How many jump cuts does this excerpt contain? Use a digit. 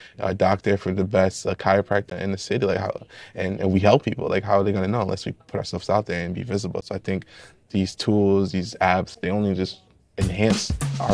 1